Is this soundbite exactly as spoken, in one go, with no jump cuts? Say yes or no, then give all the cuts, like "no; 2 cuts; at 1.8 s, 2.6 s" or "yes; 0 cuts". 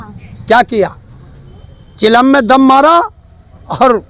yes; 0 cuts